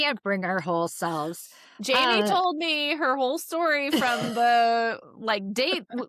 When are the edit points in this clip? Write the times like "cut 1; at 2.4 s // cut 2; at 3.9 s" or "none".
none